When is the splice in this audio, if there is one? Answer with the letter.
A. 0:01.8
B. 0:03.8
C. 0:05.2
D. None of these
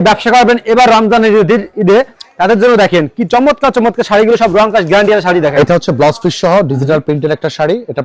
D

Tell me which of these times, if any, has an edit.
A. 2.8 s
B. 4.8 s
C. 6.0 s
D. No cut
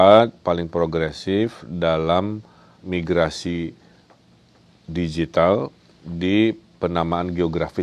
A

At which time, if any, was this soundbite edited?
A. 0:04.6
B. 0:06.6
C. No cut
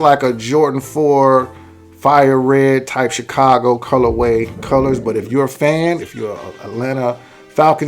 A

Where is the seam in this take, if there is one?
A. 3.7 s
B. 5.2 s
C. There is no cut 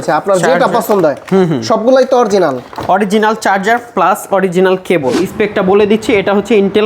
B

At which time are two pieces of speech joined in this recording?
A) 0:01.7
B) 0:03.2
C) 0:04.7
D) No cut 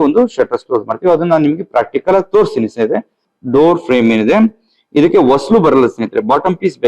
B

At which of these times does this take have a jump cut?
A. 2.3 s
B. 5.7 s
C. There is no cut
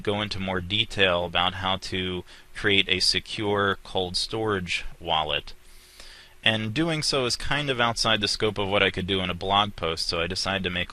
B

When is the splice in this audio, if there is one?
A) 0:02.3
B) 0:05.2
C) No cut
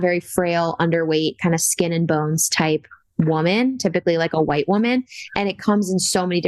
C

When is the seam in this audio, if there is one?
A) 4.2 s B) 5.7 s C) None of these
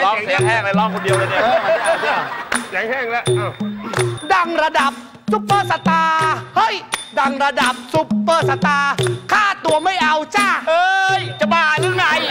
A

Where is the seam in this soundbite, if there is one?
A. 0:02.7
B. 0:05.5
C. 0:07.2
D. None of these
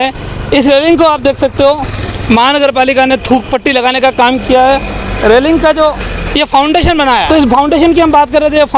C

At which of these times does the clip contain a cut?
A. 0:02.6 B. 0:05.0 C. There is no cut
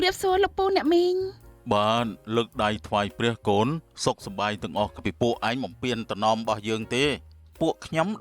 B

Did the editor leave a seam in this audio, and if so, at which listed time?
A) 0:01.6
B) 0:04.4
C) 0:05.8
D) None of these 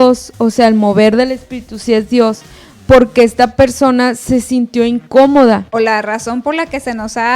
C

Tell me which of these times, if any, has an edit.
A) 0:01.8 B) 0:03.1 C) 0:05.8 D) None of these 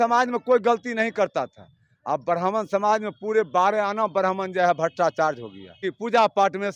C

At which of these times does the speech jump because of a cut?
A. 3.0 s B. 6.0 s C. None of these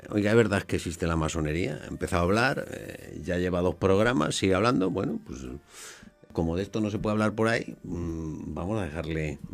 B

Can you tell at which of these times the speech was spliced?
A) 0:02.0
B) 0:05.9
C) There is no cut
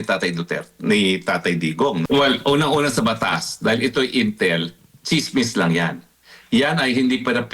A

